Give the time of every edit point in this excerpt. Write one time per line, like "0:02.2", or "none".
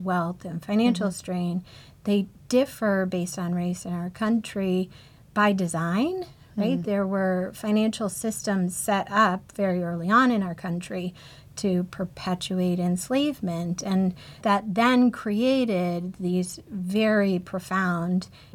0:06.8
0:14.4